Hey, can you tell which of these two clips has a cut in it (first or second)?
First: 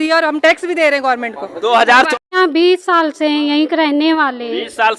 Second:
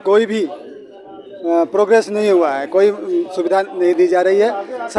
first